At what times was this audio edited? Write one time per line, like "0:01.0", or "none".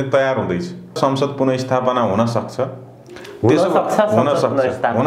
0:01.0